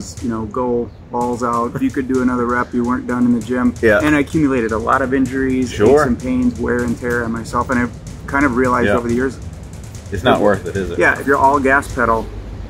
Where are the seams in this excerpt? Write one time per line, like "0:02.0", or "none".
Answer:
0:01.8
0:04.1
0:11.2